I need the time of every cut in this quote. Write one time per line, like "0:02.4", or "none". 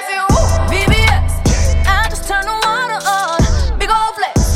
none